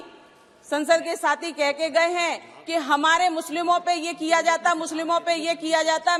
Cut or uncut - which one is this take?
uncut